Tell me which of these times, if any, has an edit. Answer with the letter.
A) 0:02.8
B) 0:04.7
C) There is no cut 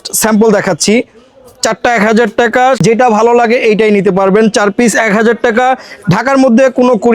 A